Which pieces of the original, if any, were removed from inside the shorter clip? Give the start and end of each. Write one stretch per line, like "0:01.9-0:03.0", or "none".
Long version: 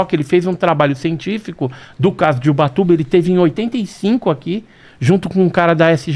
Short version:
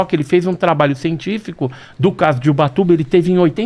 none